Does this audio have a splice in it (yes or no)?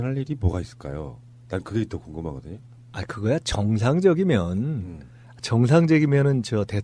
yes